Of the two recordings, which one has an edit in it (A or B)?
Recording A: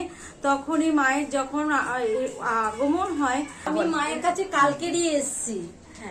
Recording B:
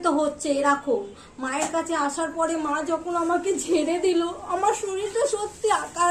A